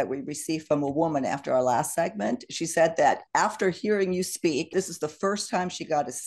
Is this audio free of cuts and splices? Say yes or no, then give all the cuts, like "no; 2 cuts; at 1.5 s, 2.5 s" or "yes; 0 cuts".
no; 1 cut; at 4.7 s